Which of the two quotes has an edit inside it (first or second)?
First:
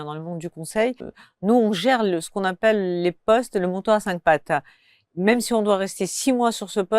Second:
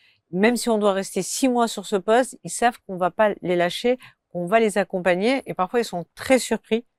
first